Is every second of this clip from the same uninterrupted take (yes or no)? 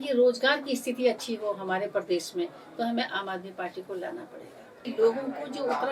no